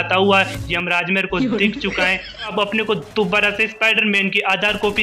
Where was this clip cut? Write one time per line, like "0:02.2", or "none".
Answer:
0:02.5